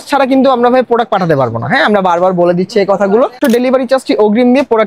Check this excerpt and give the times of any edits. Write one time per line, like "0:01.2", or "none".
0:03.4